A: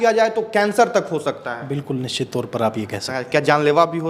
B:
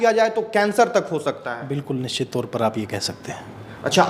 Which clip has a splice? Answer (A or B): A